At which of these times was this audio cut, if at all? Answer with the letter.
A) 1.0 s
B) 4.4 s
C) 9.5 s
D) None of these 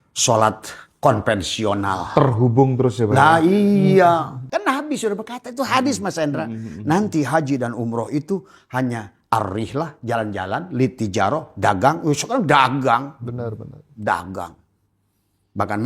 B